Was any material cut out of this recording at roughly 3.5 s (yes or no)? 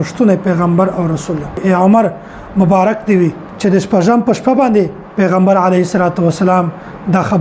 yes